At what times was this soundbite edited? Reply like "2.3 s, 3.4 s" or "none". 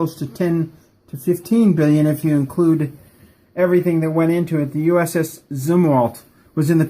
5.6 s